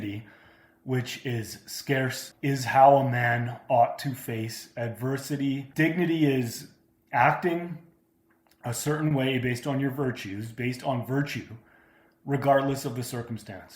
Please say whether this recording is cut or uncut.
cut